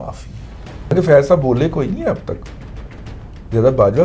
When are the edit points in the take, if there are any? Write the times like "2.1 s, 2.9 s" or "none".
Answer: 0.9 s